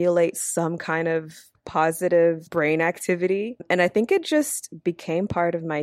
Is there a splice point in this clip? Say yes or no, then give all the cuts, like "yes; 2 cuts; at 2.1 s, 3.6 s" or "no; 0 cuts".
yes; 3 cuts; at 1.6 s, 2.4 s, 3.6 s